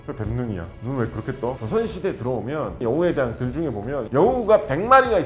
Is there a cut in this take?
yes; 3 cuts; at 1.6 s, 2.8 s, 4.0 s

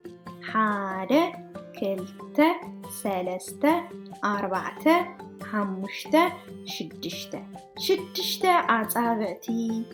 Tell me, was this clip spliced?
no; 0 cuts

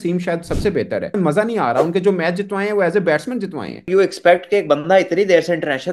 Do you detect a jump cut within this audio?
yes; 2 cuts; at 1.1 s, 3.9 s

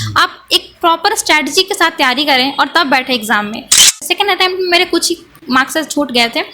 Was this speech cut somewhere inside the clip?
yes; 1 cut; at 3.9 s

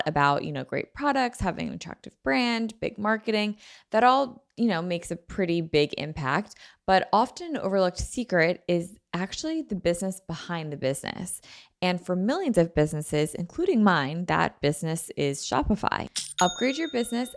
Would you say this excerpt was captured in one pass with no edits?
no; 1 cut; at 16.2 s

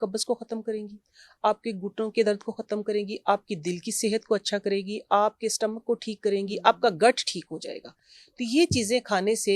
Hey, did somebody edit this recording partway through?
no; 0 cuts

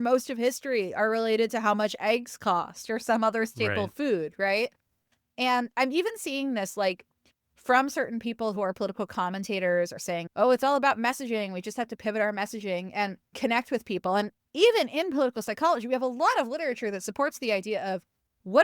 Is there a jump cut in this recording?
yes; 3 cuts; at 9.9 s, 13.2 s, 14.4 s

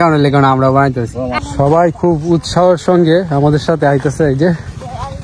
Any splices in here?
yes; 1 cut; at 1.4 s

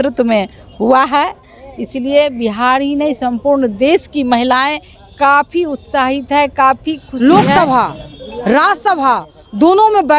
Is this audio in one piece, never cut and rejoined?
no; 1 cut; at 7.1 s

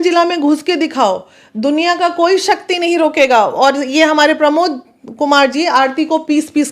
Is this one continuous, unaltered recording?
yes; 0 cuts

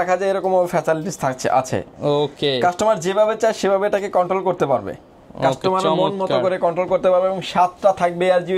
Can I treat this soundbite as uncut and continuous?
yes; 0 cuts

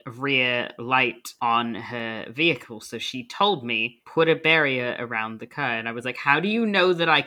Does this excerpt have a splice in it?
no; 0 cuts

